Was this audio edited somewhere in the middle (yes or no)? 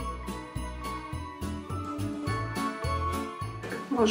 no